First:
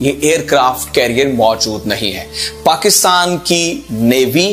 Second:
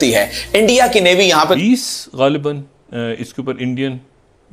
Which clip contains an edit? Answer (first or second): second